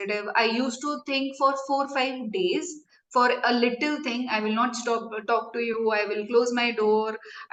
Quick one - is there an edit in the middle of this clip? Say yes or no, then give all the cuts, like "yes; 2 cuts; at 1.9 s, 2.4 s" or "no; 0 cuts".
no; 0 cuts